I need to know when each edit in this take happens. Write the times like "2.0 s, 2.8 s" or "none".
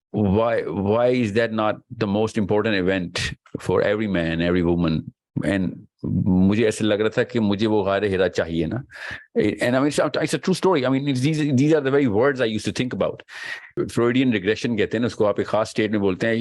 13.8 s